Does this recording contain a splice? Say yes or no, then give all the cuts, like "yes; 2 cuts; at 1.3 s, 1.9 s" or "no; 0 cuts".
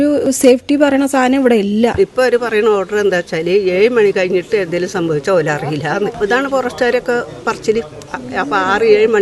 yes; 3 cuts; at 1.9 s, 6.2 s, 8.1 s